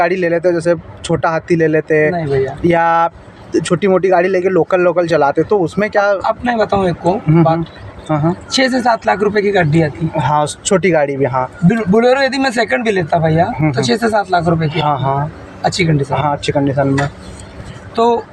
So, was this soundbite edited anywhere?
no; 0 cuts

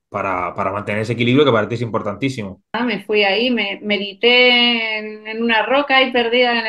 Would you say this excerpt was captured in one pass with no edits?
no; 1 cut; at 2.7 s

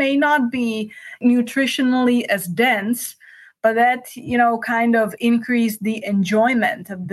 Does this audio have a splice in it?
yes; 1 cut; at 1.2 s

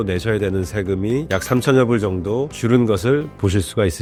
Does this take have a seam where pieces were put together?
no; 0 cuts

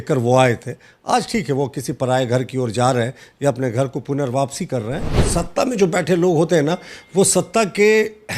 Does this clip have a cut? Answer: yes; 1 cut; at 5.2 s

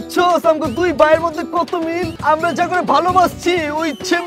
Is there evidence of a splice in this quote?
yes; 1 cut; at 2.1 s

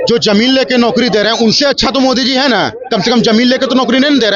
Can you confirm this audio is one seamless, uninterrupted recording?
yes; 0 cuts

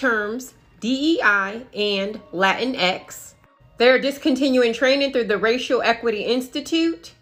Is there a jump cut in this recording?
no; 0 cuts

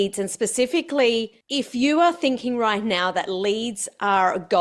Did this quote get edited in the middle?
yes; 1 cut; at 1.4 s

